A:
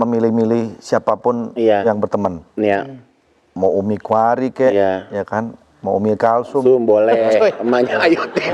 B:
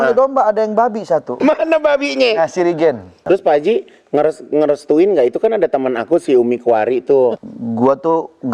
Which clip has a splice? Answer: B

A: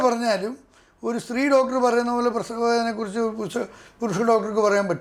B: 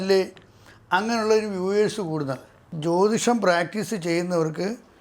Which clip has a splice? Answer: B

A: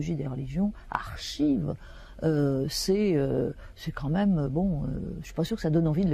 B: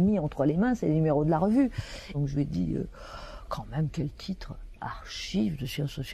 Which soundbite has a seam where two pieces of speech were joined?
A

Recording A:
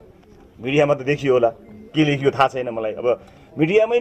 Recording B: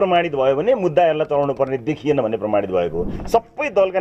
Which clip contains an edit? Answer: B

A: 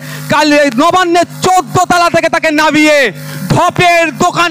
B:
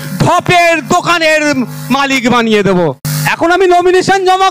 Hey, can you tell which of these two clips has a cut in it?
B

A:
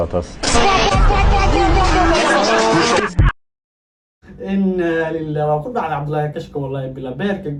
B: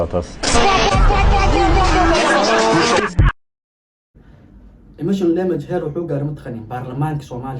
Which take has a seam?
B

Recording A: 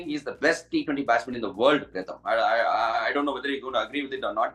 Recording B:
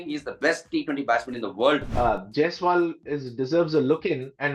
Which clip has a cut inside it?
B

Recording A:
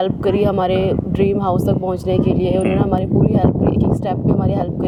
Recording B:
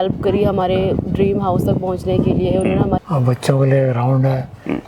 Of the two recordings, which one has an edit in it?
B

